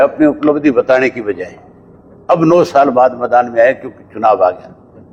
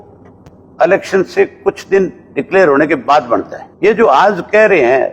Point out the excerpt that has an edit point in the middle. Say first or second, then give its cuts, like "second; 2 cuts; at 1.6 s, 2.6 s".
second; 1 cut; at 3.6 s